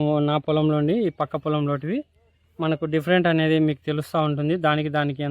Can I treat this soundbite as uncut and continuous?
no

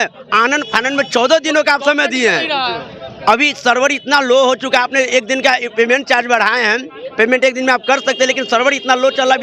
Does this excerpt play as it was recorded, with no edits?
yes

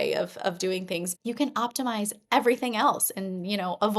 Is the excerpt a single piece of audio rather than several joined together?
no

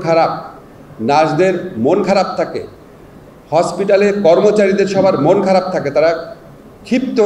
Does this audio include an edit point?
no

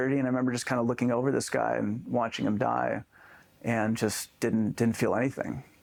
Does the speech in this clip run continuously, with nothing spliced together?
yes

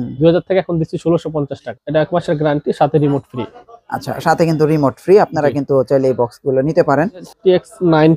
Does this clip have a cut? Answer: yes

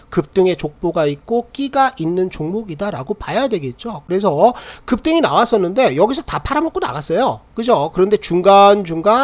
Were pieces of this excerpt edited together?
no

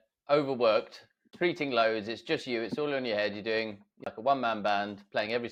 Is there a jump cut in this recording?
no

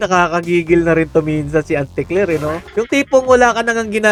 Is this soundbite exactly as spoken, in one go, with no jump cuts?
yes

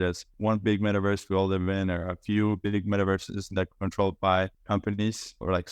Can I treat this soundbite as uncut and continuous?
yes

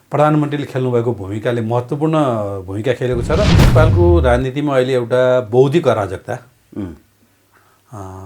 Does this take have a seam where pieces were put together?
yes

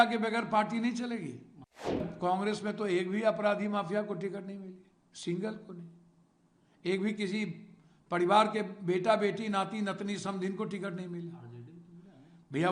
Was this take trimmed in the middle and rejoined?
yes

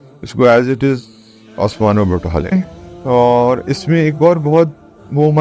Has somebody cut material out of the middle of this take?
yes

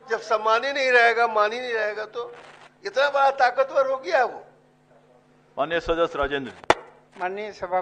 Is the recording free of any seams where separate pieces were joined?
yes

